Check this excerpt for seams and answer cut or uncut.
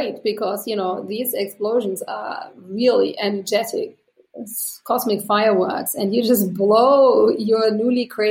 uncut